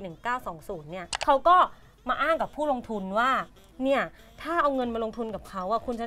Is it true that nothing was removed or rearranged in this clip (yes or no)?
yes